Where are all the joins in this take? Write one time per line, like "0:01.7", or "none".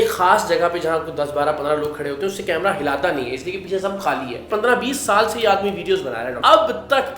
0:04.5
0:06.4